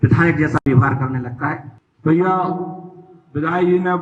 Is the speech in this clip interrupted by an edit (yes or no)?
yes